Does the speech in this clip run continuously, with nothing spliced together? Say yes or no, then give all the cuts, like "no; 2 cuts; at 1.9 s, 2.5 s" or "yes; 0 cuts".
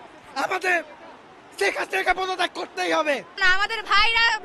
yes; 0 cuts